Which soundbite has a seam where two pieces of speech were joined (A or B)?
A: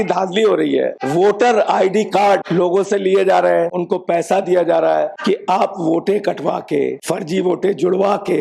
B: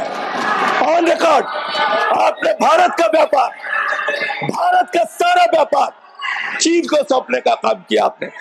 A